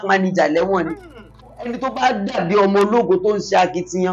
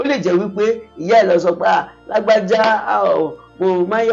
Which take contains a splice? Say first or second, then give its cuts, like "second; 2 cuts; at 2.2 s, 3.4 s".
first; 1 cut; at 1.5 s